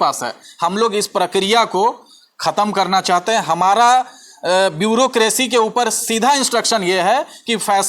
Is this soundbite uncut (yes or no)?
yes